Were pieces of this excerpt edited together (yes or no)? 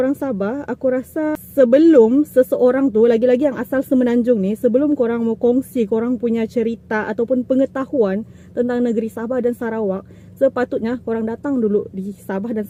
no